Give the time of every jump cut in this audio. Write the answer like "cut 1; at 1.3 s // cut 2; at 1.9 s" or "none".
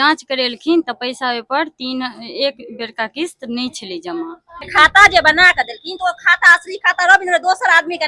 cut 1; at 4.7 s